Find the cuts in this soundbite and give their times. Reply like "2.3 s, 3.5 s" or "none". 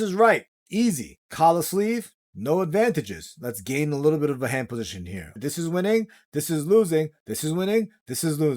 5.4 s

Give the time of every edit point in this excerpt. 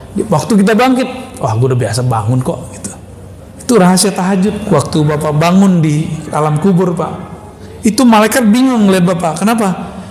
4.6 s

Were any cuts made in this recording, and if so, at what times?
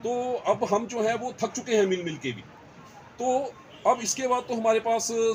none

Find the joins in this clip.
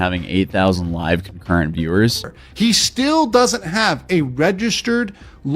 2.4 s

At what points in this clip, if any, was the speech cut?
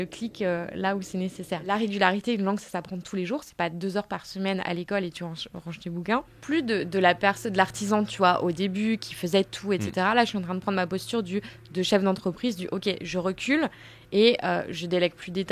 1.7 s, 6.3 s

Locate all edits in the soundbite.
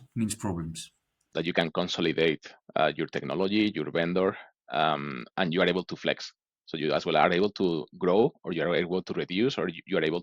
1.3 s

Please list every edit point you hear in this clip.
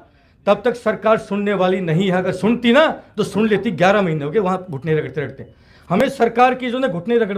none

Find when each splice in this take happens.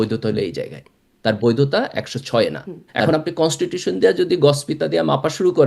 3.1 s

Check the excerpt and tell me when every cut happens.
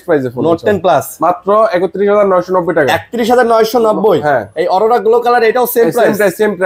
none

